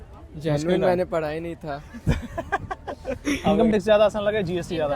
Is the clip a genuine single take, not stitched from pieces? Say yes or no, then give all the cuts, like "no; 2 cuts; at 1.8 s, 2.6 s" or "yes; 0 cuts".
no; 1 cut; at 3.5 s